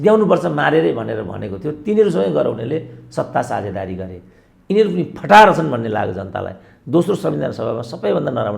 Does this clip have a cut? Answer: no; 0 cuts

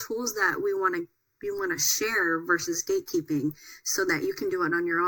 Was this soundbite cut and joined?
no; 0 cuts

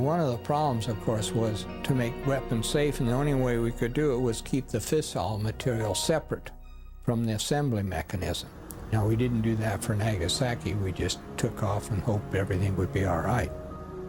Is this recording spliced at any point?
no; 0 cuts

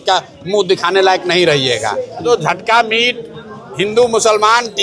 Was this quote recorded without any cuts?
no; 1 cut; at 2.2 s

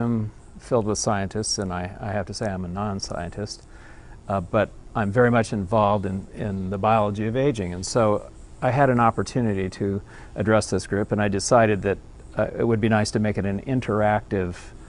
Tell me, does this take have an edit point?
yes; 1 cut; at 13.2 s

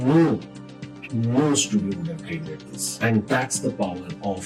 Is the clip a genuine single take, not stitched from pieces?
yes; 0 cuts

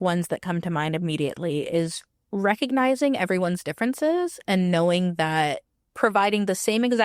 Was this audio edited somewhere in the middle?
no; 0 cuts

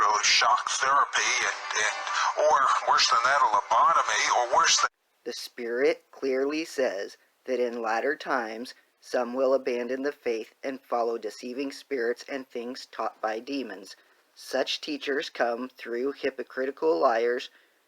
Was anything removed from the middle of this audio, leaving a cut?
yes; 1 cut; at 4.8 s

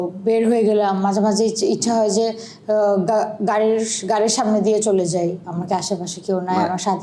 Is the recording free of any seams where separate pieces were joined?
no; 1 cut; at 5.5 s

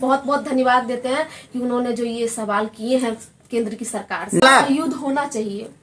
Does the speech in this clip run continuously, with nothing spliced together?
no; 1 cut; at 4.4 s

